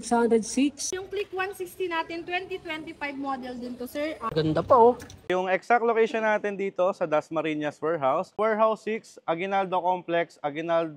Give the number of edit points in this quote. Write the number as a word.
four